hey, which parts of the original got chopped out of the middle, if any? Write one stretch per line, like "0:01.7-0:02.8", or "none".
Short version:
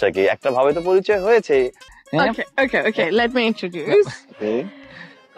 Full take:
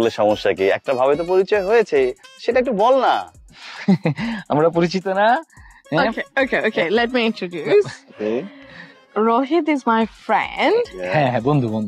0:02.3-0:05.6